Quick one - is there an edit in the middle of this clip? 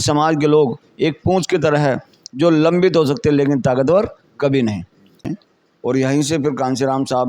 yes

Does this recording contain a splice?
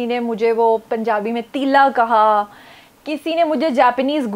no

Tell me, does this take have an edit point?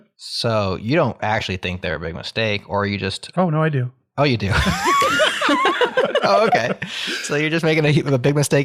no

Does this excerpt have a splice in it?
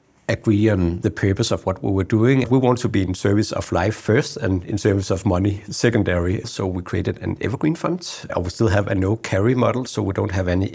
yes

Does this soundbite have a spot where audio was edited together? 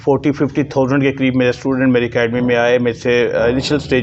no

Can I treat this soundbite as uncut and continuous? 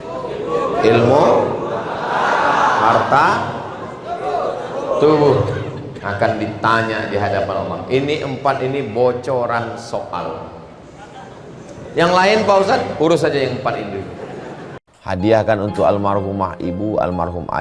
no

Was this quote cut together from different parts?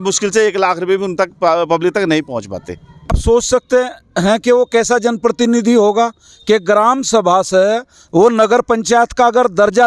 yes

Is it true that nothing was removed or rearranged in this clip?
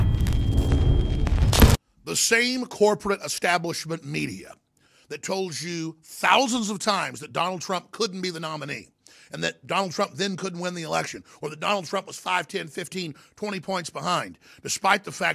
no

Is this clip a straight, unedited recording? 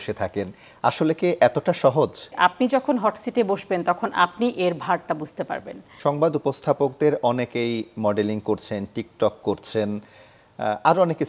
no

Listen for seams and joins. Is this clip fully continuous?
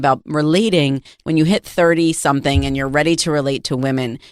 yes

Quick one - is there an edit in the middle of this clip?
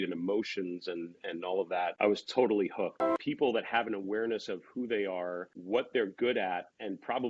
yes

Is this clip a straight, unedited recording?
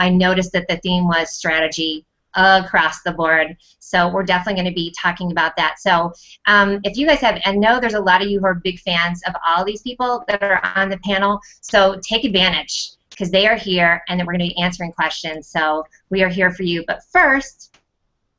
no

